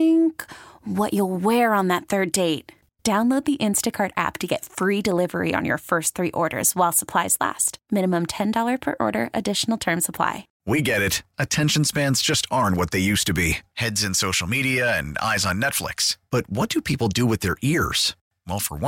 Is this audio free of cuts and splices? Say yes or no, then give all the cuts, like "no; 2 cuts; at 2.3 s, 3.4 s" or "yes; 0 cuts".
no; 1 cut; at 10.5 s